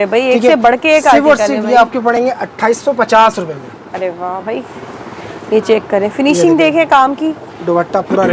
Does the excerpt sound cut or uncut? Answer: uncut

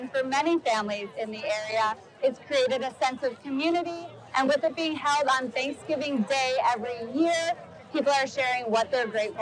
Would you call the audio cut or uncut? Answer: uncut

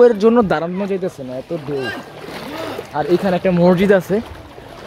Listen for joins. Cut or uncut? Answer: cut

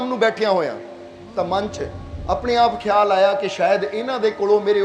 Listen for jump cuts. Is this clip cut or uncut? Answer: uncut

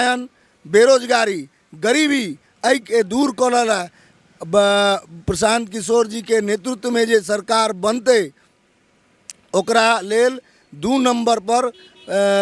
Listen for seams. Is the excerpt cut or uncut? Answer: uncut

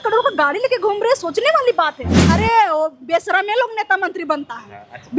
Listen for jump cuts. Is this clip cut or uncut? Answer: cut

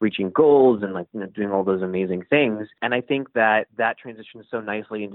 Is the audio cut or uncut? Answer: cut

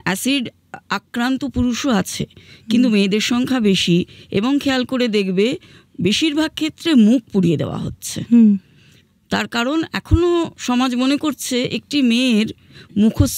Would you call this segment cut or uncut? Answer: uncut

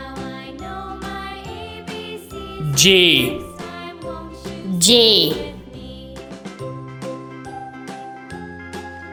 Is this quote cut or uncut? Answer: uncut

